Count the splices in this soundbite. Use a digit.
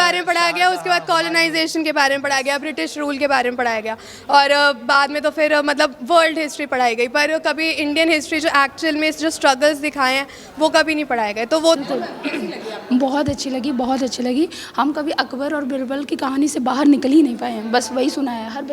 1